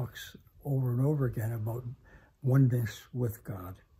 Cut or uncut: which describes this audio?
uncut